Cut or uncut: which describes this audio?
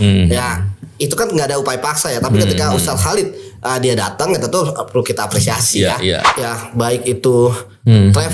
cut